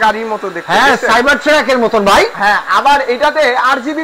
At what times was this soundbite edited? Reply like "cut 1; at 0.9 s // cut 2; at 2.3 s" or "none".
none